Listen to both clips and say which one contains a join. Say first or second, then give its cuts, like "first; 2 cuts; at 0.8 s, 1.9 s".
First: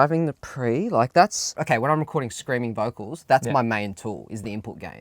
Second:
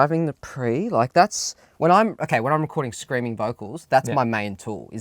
first; 1 cut; at 1.6 s